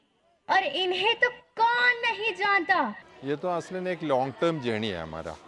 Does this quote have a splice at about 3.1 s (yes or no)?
yes